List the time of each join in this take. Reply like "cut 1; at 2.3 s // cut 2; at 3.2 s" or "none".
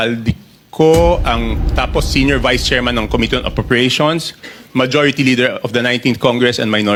none